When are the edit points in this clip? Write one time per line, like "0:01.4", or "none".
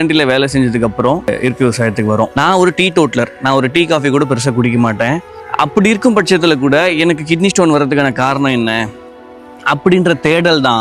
0:02.3
0:05.4